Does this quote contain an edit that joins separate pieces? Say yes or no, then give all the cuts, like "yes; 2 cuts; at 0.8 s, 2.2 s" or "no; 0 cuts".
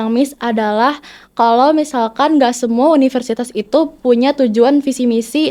no; 0 cuts